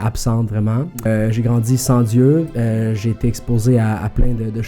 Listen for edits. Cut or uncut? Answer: cut